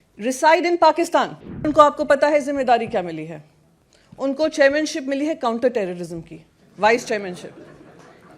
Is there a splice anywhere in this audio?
yes; 1 cut; at 1.7 s

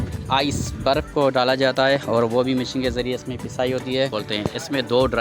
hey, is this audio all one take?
no; 1 cut; at 4.1 s

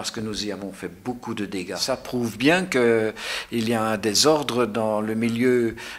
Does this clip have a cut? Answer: yes; 1 cut; at 1.8 s

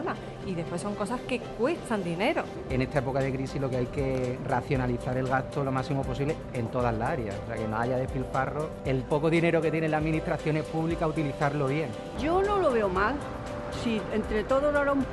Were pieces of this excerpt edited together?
yes; 1 cut; at 7.1 s

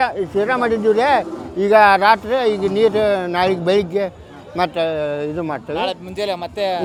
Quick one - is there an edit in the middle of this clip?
no; 0 cuts

